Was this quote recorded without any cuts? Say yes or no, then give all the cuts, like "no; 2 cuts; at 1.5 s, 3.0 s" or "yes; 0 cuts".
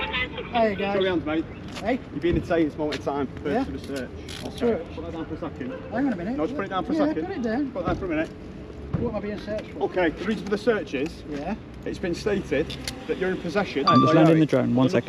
yes; 0 cuts